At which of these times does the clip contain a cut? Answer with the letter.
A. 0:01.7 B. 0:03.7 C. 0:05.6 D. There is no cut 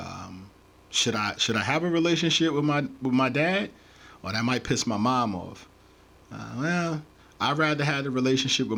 D